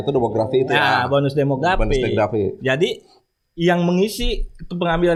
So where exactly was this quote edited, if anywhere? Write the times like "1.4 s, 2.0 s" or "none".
none

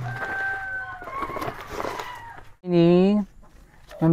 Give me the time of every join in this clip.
2.7 s

